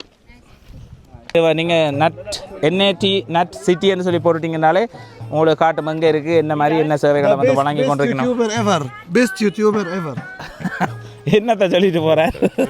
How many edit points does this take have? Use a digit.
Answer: 1